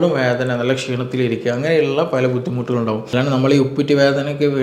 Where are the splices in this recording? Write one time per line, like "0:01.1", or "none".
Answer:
0:03.1